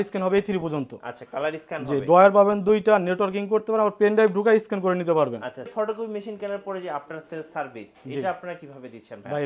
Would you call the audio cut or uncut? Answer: cut